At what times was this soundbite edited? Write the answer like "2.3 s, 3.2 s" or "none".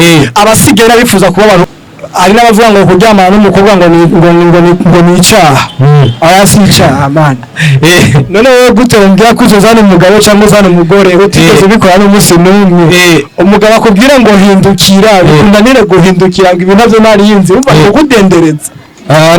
1.6 s